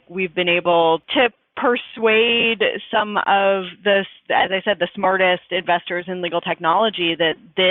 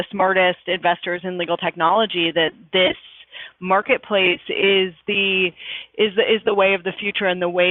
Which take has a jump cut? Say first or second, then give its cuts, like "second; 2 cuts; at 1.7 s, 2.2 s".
first; 1 cut; at 1.1 s